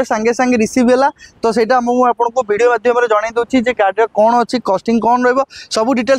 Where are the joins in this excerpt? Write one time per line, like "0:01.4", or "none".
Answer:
none